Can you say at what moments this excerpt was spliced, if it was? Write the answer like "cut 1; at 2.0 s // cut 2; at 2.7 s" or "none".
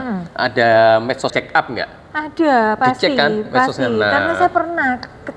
cut 1; at 1.3 s